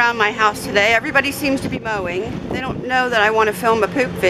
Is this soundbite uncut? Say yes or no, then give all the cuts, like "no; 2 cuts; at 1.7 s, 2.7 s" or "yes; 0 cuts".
no; 1 cut; at 2.3 s